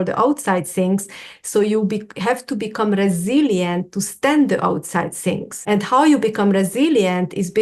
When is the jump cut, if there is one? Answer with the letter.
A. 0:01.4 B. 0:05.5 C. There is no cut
B